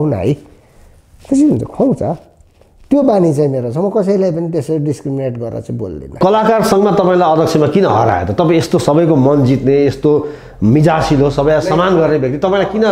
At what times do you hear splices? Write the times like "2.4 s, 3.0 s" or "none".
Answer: 6.2 s